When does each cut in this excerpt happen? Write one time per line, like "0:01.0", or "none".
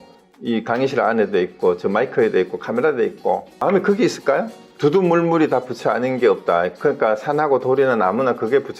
0:03.6
0:04.6